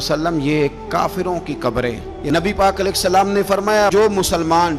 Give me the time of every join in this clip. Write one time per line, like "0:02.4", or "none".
0:02.1